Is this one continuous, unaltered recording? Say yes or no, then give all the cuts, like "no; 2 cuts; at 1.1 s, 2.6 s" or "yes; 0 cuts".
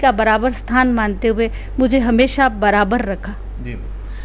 yes; 0 cuts